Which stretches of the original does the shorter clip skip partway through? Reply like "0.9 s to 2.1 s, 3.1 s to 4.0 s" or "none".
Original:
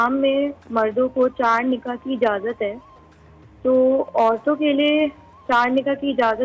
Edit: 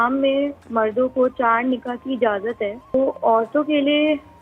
2.9 s to 3.9 s